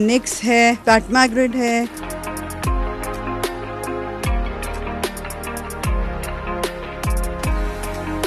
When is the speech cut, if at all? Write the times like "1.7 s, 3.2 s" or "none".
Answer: 5.4 s, 7.0 s